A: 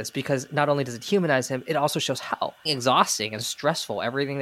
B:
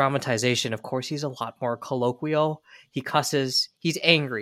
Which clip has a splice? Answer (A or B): A